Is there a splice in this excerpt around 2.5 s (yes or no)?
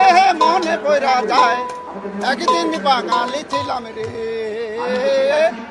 no